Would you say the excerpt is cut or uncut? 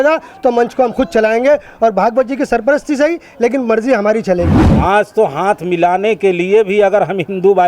cut